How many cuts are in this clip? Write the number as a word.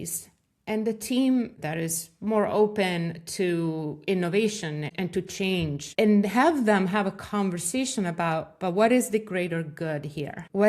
three